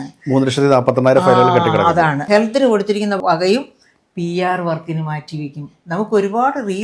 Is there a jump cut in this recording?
yes; 2 cuts; at 2.2 s, 3.2 s

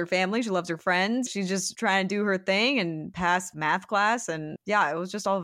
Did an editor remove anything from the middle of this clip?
yes; 3 cuts; at 1.3 s, 3.4 s, 4.5 s

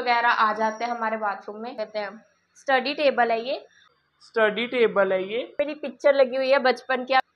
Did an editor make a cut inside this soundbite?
yes; 2 cuts; at 1.7 s, 5.5 s

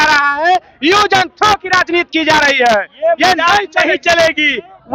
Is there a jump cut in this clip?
no; 0 cuts

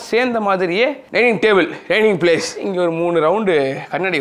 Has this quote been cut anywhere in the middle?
yes; 1 cut; at 2.6 s

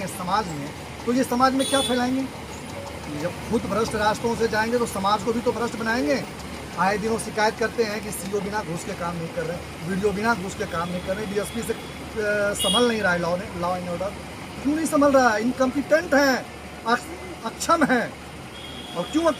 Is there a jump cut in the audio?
no; 0 cuts

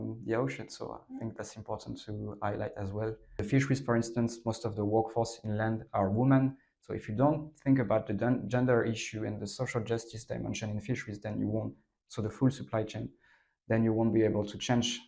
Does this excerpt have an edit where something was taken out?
yes; 1 cut; at 3.5 s

